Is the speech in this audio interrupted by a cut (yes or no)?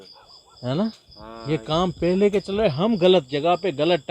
no